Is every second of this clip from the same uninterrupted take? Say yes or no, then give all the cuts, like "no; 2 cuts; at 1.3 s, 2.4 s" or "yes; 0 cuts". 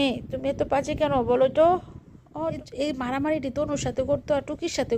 no; 1 cut; at 2.6 s